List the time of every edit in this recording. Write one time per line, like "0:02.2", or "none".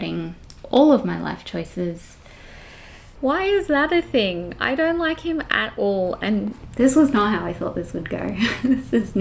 0:03.1
0:06.6